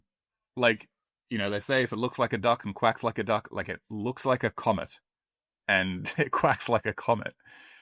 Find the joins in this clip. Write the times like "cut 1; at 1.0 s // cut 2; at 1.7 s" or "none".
none